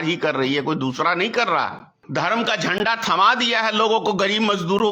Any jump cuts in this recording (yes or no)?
yes